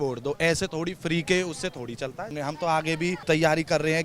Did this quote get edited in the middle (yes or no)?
yes